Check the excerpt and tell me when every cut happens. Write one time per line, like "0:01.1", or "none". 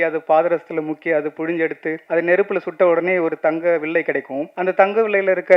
0:02.0
0:04.4